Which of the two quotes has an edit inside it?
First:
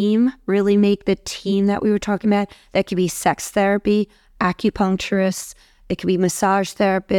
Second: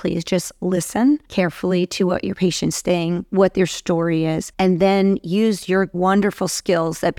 second; 3 cuts; at 1.3 s, 4.5 s, 5.9 s

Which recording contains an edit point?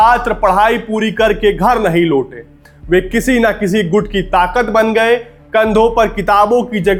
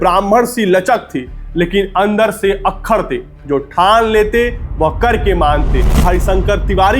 second; 1 cut; at 6.0 s

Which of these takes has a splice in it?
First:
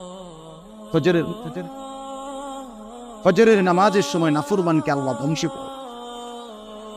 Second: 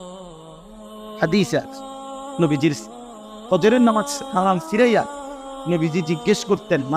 second; 1 cut; at 0.9 s

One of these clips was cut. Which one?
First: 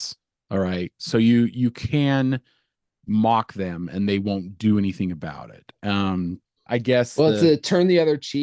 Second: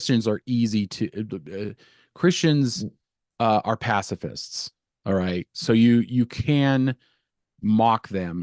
first; 1 cut; at 6.5 s

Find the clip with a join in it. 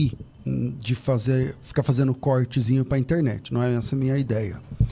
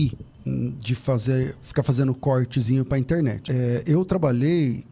second; 1 cut; at 3.4 s

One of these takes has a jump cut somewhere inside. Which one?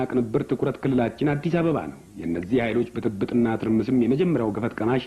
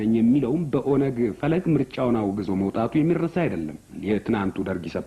second; 1 cut; at 3.9 s

